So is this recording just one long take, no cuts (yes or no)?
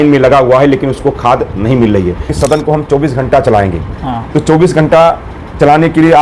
no